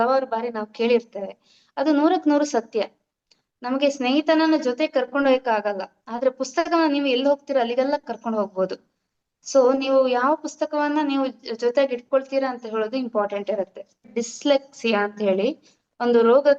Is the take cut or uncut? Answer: cut